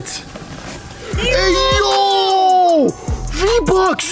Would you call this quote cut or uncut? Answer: uncut